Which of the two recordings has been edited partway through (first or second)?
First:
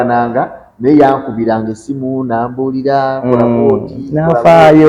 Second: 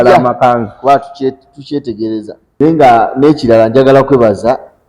second